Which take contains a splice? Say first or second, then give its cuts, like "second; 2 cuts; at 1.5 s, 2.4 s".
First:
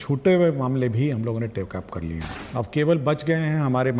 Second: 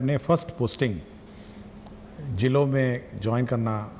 first; 1 cut; at 2.3 s